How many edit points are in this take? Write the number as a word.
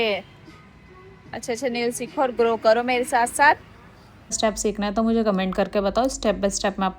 one